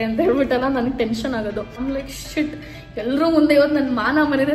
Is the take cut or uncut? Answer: cut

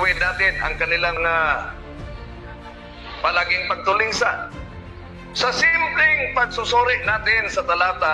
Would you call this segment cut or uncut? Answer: cut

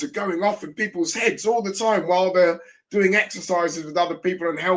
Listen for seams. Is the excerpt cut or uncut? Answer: uncut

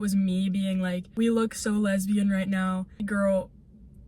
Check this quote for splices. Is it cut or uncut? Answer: cut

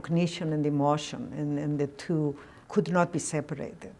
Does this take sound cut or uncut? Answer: cut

